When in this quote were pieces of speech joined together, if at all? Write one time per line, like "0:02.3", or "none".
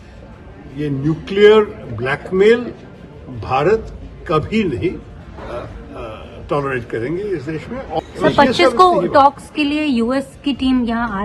0:08.0

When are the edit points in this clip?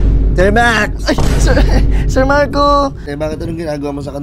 0:03.0

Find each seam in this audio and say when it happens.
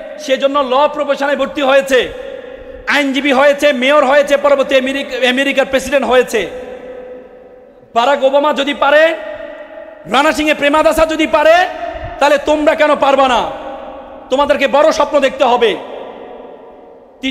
none

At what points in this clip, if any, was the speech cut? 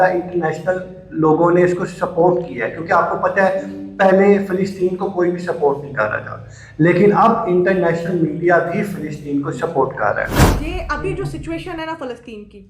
0:10.4

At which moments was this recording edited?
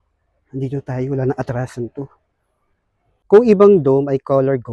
0:03.1

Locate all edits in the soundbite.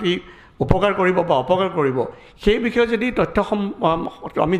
none

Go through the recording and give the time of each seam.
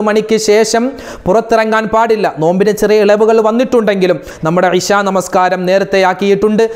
0:04.3

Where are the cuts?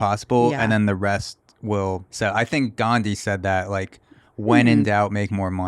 0:02.1

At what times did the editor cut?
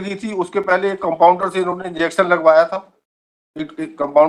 none

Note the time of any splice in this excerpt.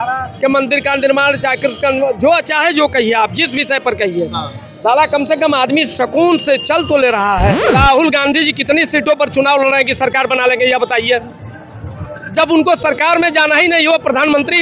0:07.6

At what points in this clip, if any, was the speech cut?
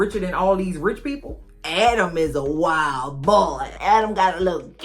0:01.4

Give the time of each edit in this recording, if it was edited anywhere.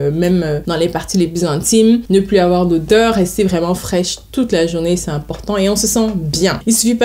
none

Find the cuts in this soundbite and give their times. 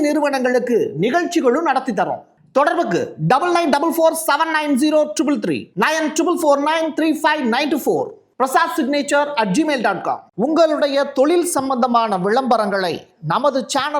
0:10.3

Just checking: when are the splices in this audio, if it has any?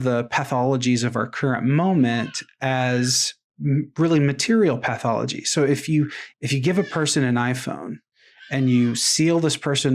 0:06.2

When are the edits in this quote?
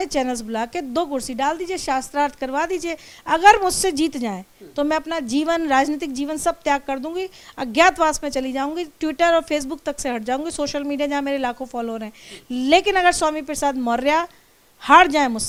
none

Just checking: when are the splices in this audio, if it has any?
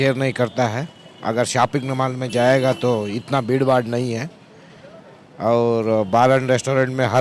none

